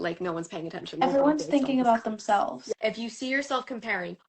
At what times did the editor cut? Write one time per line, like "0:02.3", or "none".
0:01.0
0:02.6